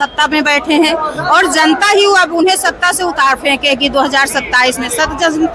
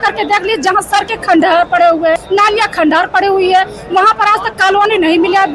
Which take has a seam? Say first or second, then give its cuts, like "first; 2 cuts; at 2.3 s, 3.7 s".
second; 1 cut; at 2.2 s